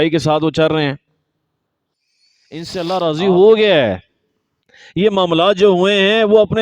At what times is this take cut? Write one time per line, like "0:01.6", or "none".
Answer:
0:02.8